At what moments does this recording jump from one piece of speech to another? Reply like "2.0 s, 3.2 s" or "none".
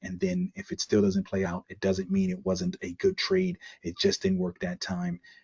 1.4 s